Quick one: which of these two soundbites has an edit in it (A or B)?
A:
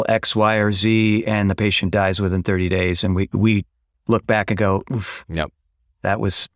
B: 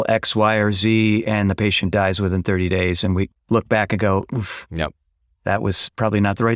B